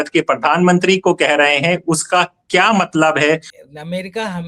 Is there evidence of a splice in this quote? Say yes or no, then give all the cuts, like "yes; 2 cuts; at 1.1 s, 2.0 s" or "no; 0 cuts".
yes; 1 cut; at 3.5 s